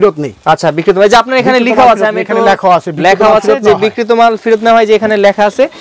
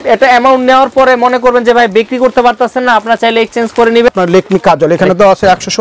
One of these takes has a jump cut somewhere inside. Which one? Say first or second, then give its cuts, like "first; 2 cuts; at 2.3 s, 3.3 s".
second; 1 cut; at 4.1 s